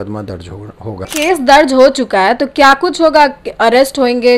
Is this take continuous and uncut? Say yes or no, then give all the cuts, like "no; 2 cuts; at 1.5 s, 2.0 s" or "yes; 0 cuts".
no; 1 cut; at 1.1 s